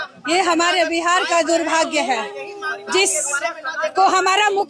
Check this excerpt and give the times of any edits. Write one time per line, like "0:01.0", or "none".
none